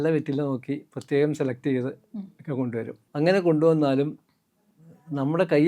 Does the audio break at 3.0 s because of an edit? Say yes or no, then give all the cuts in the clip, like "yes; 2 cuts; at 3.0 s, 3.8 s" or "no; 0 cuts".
yes; 1 cut; at 3.0 s